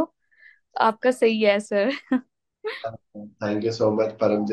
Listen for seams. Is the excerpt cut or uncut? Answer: uncut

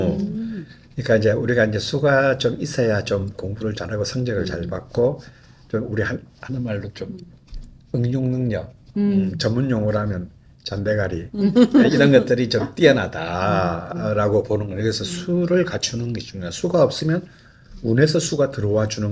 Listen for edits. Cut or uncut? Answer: uncut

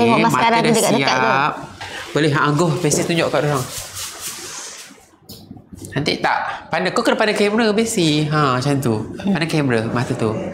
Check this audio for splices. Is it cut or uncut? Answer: uncut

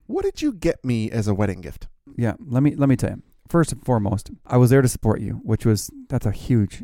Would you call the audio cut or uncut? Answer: cut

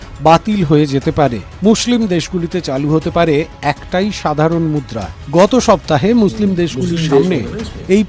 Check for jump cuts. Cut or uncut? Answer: cut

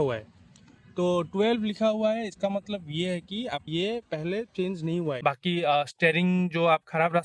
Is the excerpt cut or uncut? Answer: cut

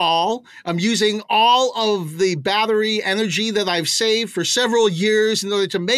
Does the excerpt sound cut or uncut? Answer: uncut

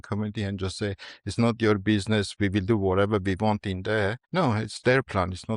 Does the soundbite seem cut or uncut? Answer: cut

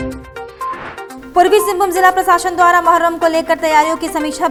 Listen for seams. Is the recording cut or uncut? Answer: uncut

